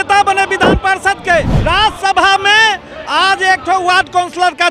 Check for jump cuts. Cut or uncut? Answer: cut